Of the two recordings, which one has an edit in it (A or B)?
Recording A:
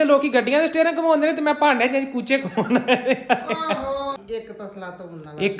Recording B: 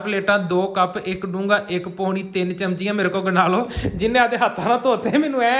A